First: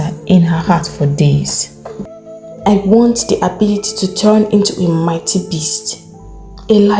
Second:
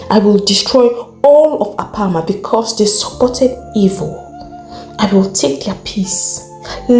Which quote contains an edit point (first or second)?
first